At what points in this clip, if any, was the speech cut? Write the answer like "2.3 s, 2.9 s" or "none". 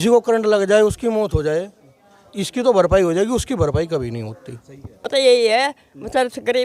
5.1 s